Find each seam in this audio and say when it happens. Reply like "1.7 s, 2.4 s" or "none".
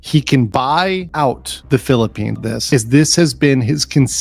2.4 s